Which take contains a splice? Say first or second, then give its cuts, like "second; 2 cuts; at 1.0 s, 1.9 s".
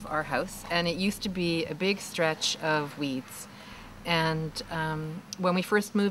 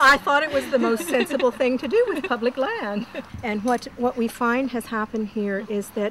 second; 1 cut; at 3.2 s